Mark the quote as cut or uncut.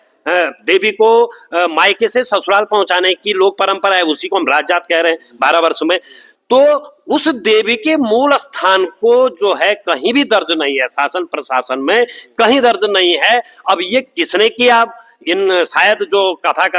uncut